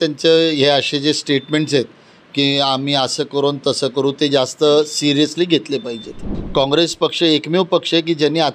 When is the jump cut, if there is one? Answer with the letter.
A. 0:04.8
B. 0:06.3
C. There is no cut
B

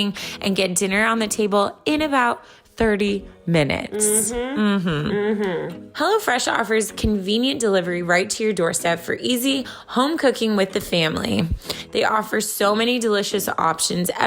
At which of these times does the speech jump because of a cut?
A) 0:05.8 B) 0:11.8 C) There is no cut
A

